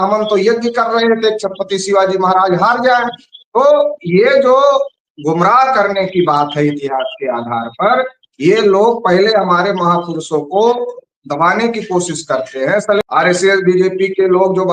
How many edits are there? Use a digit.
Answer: 1